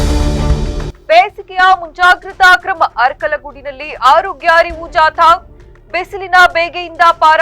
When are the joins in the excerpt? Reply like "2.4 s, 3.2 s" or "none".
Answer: 0.9 s